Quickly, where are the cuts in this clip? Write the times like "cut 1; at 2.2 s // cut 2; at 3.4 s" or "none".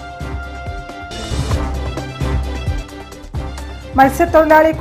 cut 1; at 3.5 s